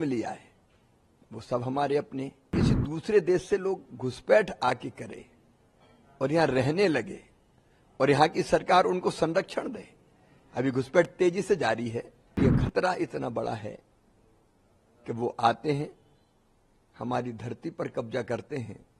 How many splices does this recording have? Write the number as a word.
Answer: two